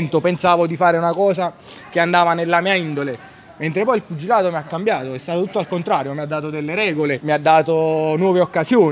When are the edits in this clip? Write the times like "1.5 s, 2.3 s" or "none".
none